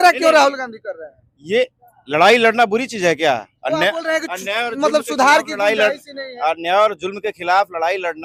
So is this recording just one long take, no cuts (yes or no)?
yes